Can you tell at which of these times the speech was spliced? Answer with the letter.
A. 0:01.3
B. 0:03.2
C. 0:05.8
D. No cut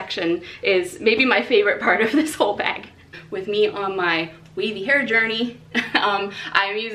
B